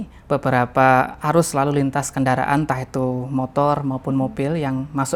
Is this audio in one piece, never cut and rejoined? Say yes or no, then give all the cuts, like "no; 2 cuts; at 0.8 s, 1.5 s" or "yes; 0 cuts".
yes; 0 cuts